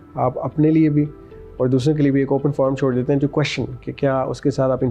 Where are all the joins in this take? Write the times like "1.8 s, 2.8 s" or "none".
none

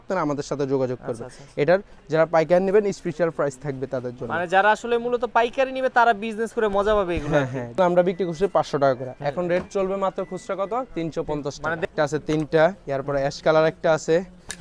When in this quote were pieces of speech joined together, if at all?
2.0 s, 7.8 s, 11.9 s

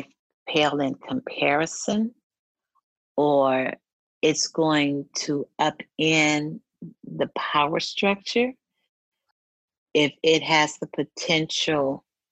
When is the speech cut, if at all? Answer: none

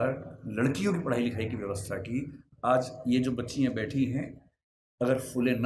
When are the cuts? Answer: none

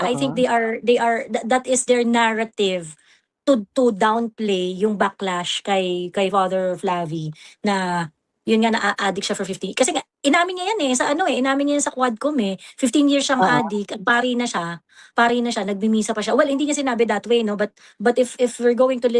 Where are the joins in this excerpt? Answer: none

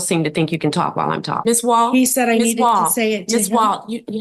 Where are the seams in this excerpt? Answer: 1.3 s

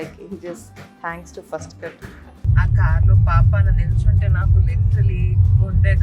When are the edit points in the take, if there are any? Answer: 2.4 s

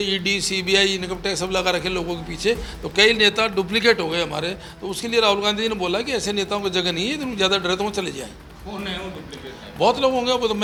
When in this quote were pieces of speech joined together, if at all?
none

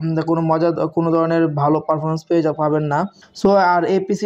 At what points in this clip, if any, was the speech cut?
3.2 s

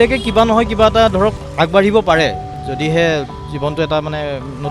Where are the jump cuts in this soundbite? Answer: 1.4 s

